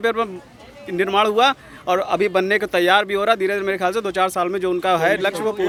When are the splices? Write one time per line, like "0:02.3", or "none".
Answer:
none